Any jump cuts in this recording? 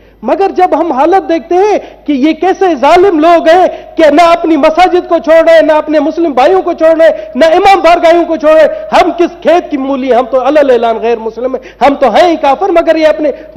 no; 0 cuts

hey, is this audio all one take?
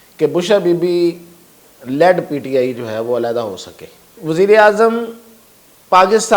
no; 1 cut; at 4.2 s

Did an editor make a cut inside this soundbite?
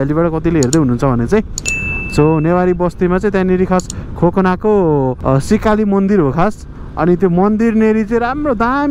yes; 1 cut; at 5.2 s

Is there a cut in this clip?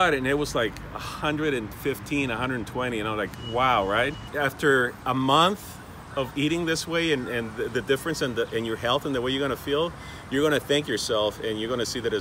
yes; 1 cut; at 4.3 s

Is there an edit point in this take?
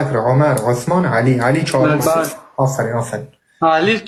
no; 0 cuts

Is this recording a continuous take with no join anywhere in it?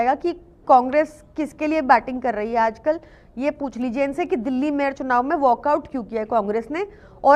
yes; 0 cuts

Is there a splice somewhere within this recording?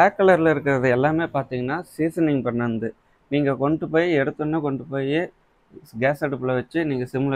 no; 0 cuts

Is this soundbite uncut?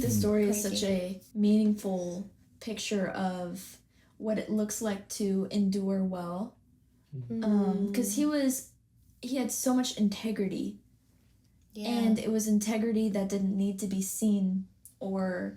no; 1 cut; at 1.2 s

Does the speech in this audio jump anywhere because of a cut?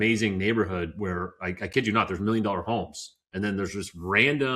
no; 0 cuts

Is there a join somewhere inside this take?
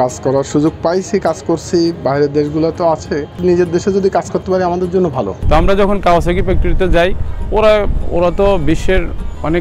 yes; 2 cuts; at 3.4 s, 5.4 s

